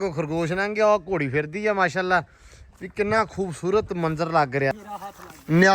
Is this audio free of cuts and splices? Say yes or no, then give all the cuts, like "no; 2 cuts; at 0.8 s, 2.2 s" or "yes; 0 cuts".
no; 1 cut; at 4.8 s